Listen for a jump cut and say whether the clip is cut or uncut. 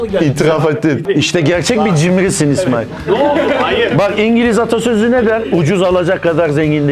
uncut